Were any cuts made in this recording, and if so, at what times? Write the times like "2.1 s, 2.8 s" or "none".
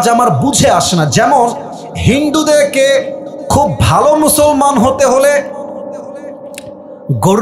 none